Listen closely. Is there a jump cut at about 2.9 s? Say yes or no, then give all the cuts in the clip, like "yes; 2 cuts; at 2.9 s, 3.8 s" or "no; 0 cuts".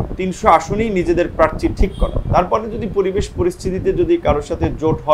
no; 0 cuts